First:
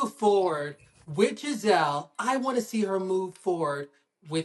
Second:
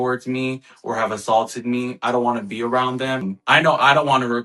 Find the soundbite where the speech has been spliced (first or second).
second